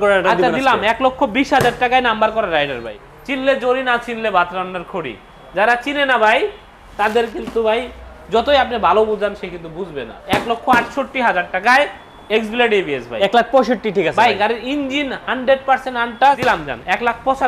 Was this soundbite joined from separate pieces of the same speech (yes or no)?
yes